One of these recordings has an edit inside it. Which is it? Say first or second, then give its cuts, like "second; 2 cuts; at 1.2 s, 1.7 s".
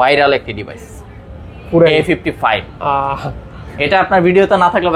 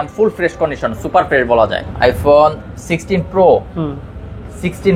second; 1 cut; at 1.9 s